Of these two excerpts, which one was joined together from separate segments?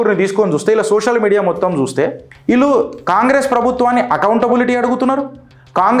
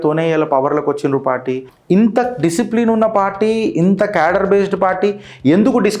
second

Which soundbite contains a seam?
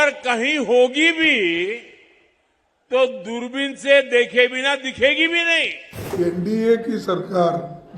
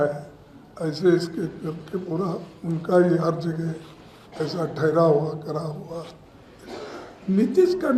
first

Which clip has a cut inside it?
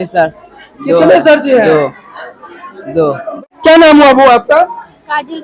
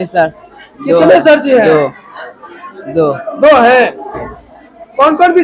first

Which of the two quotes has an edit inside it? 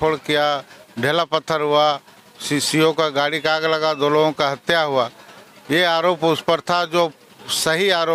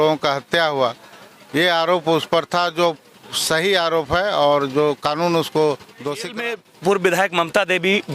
second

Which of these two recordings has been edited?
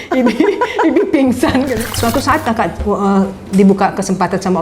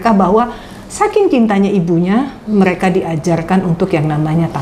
first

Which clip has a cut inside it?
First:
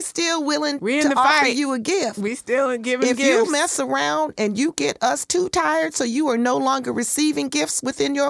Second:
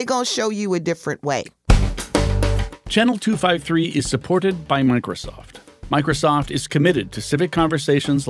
second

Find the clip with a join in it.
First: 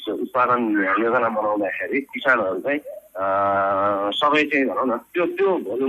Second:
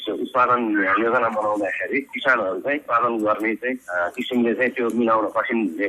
second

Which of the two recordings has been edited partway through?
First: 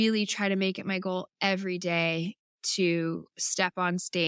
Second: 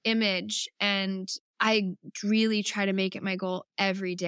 second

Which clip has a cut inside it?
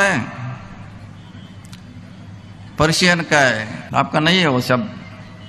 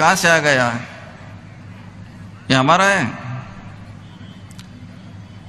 first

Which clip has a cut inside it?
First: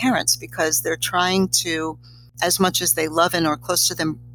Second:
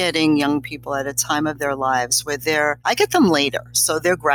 second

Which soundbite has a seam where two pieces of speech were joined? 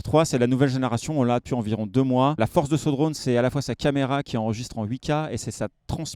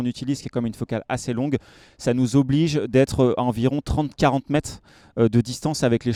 first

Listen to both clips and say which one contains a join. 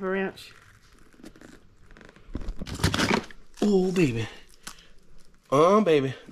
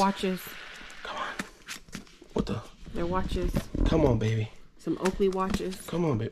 first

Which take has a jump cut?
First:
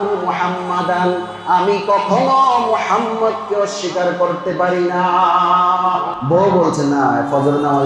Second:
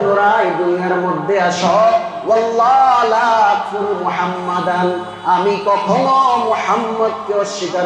first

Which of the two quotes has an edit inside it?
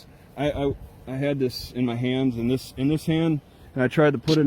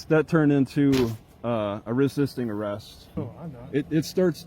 second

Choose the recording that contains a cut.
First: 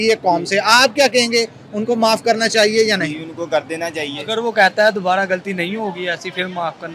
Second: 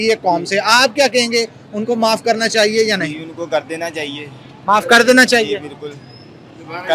first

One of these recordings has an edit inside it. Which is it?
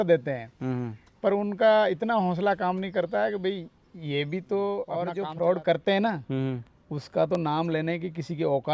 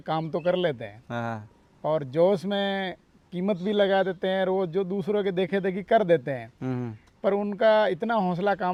first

